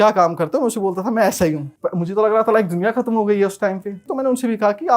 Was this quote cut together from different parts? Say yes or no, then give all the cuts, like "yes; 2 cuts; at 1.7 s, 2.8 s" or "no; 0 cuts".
yes; 2 cuts; at 1.7 s, 4.0 s